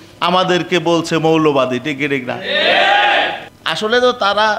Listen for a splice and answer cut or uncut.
cut